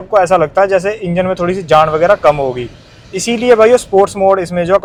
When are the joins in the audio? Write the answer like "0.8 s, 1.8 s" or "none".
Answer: none